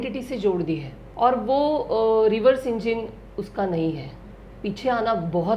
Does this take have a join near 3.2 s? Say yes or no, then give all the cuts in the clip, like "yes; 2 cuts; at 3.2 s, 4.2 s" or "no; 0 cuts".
no; 1 cut; at 1.0 s